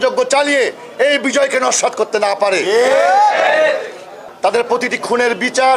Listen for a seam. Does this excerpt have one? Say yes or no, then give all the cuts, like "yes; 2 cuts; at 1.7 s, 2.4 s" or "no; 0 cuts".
yes; 1 cut; at 4.2 s